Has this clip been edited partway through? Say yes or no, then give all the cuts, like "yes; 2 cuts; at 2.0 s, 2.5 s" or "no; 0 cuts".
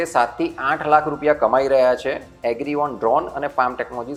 no; 0 cuts